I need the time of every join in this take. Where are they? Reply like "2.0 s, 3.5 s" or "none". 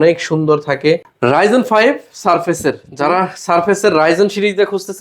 1.1 s